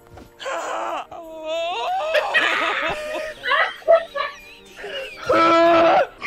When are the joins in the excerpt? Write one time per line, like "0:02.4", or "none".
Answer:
0:01.0